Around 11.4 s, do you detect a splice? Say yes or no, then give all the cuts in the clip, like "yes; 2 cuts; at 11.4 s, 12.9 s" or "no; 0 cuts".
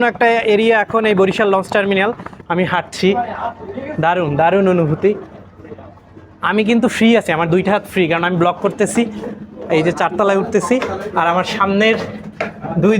no; 1 cut; at 2.3 s